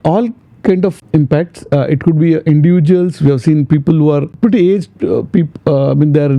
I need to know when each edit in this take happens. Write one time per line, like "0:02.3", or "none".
0:01.0
0:04.3

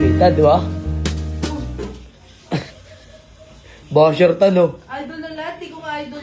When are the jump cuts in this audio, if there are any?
none

